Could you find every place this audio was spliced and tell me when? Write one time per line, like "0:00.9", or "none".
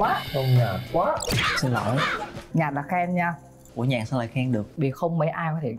0:02.5